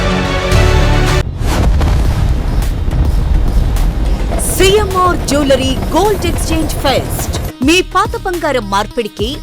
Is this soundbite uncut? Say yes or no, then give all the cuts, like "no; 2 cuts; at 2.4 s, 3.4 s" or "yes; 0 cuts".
no; 1 cut; at 1.2 s